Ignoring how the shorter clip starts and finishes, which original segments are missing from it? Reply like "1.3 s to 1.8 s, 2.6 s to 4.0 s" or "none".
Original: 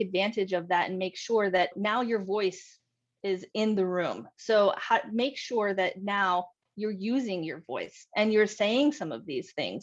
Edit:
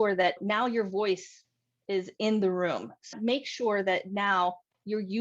4.5 s to 5.0 s

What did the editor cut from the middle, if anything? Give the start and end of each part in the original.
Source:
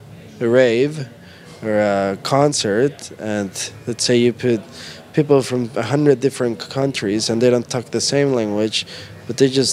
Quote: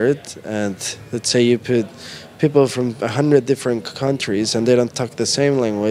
none

